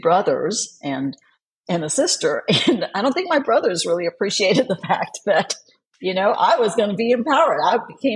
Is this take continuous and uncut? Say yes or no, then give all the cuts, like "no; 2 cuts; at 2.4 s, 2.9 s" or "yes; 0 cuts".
yes; 0 cuts